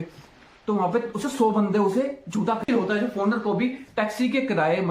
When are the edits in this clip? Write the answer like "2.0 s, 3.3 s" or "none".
2.6 s